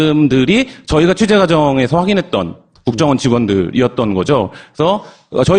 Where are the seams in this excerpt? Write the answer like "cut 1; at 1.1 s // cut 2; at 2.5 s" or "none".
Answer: none

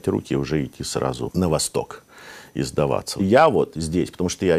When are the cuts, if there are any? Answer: cut 1; at 1.3 s // cut 2; at 3.1 s

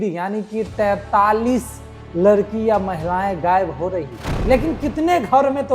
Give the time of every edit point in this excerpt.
cut 1; at 4.3 s

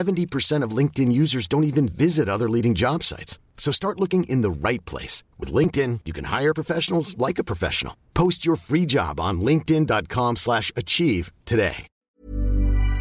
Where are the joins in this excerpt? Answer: cut 1; at 12.1 s

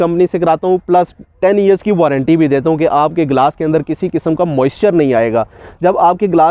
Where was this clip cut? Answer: none

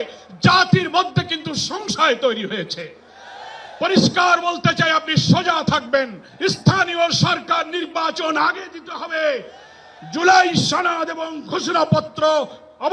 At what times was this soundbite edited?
cut 1; at 6.2 s

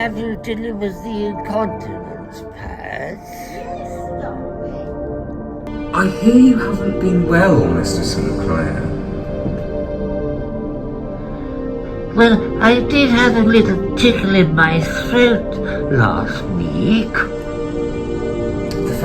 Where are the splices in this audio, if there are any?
cut 1; at 5.7 s

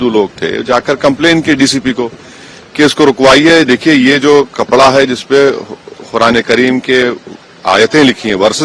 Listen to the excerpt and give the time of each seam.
none

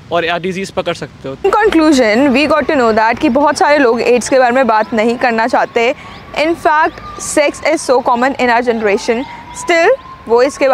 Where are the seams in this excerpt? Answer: cut 1; at 1.5 s

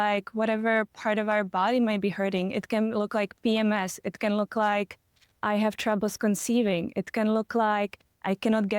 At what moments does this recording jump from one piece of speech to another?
cut 1; at 5.4 s

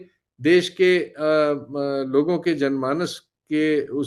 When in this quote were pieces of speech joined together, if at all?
none

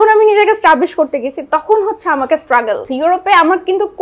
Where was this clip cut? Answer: cut 1; at 2.9 s

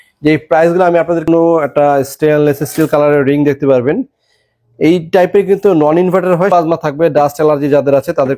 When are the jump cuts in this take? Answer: cut 1; at 1.3 s // cut 2; at 6.5 s

